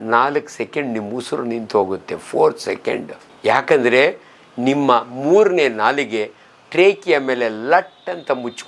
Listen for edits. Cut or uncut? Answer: uncut